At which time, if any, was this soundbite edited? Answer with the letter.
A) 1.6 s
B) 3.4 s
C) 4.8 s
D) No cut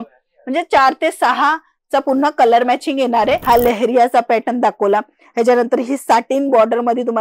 B